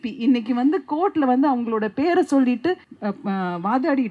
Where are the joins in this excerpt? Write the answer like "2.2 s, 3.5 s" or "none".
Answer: 2.9 s